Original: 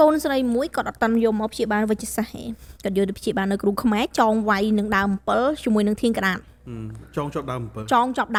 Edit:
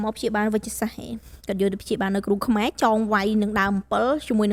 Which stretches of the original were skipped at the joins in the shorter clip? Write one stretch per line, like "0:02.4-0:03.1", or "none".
none